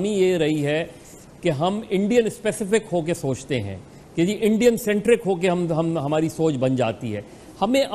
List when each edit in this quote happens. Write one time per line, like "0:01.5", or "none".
0:03.9